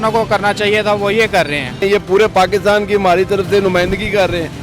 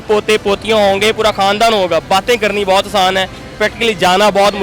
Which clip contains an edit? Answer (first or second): first